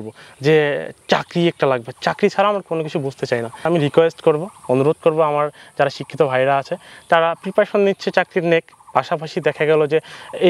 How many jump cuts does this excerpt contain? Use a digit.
1